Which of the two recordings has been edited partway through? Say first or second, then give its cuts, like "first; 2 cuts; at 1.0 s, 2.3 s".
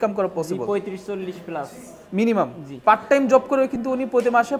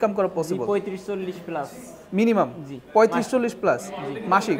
first; 1 cut; at 2.7 s